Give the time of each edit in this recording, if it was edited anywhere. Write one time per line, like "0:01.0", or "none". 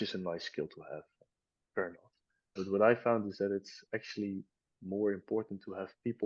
0:02.5